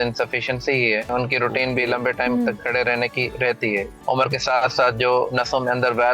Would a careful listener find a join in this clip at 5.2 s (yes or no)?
no